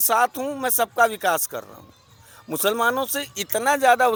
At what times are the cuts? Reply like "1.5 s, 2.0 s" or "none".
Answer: none